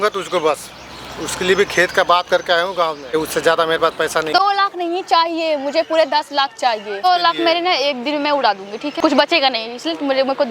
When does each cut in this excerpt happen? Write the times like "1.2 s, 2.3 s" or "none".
3.1 s, 4.4 s, 7.0 s, 9.0 s